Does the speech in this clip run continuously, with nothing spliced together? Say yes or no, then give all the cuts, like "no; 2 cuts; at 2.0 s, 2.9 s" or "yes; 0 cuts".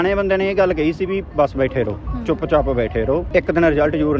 no; 1 cut; at 3.3 s